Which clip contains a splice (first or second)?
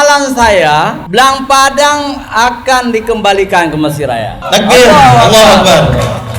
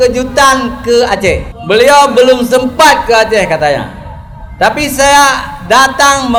first